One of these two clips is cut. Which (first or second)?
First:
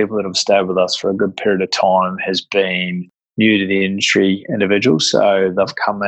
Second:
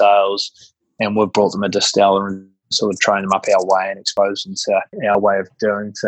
second